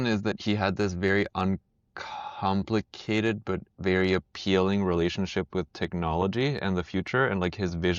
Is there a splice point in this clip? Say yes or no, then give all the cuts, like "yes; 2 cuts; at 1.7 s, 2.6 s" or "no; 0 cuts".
no; 0 cuts